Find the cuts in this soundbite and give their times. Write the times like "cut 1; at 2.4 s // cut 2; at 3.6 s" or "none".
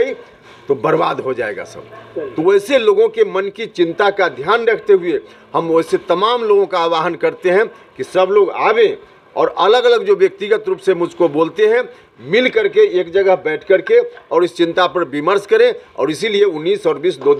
none